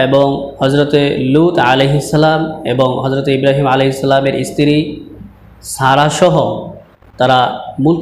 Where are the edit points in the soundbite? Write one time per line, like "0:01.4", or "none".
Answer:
none